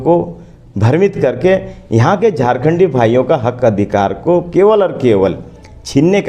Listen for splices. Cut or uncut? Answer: uncut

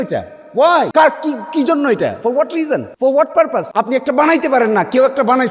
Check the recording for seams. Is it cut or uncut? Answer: cut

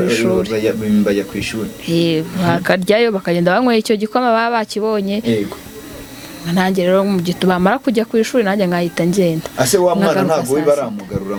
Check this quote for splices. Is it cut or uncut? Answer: uncut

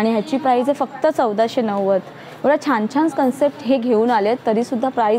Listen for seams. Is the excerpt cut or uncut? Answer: uncut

